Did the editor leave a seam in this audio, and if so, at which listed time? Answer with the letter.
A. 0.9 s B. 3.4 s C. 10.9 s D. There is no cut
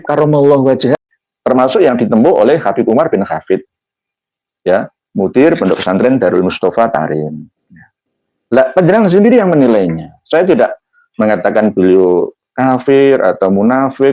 A